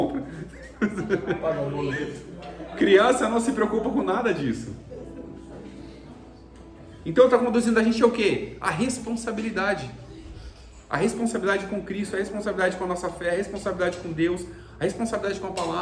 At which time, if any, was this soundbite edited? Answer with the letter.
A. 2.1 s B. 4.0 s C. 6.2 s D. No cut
D